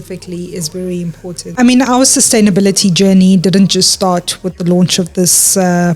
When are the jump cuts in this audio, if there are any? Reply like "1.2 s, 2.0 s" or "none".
1.5 s